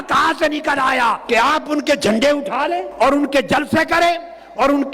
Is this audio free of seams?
no; 2 cuts; at 1.2 s, 2.9 s

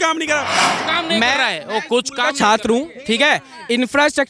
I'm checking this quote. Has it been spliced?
no; 0 cuts

